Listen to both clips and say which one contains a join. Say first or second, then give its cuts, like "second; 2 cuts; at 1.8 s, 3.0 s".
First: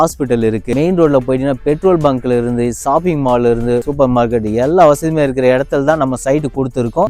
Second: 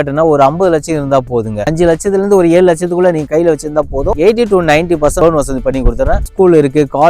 second; 3 cuts; at 1.6 s, 4.1 s, 6.3 s